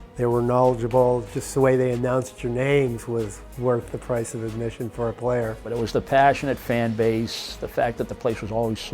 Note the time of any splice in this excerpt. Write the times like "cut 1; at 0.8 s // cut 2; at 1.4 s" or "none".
cut 1; at 5.7 s